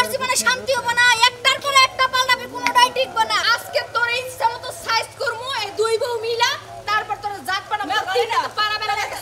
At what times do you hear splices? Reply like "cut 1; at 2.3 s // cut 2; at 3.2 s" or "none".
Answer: cut 1; at 3.5 s